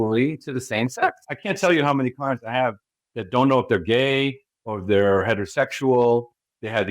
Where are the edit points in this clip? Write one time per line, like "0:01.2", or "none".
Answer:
0:01.3